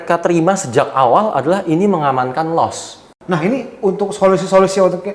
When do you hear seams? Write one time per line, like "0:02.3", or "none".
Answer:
0:03.1